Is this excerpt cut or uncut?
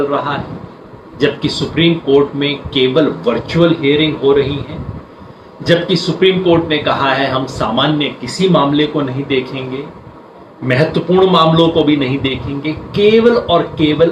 uncut